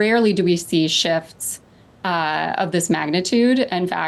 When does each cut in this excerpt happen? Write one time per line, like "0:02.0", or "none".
none

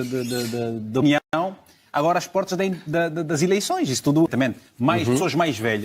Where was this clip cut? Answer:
0:04.3

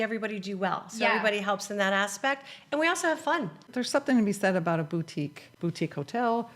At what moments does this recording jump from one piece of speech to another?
0:03.6
0:05.4

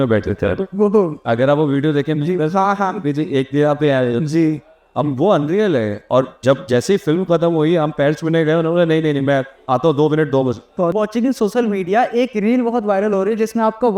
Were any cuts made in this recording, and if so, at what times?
0:10.9

